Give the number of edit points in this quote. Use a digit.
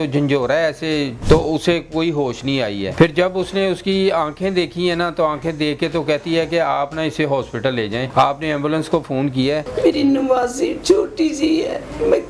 4